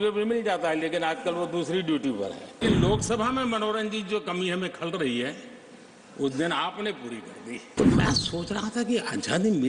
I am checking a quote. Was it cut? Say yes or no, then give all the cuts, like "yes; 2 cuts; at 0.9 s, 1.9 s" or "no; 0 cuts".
yes; 2 cuts; at 2.6 s, 7.7 s